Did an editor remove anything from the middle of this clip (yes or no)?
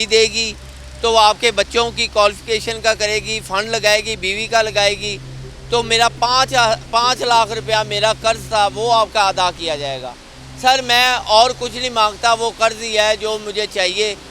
no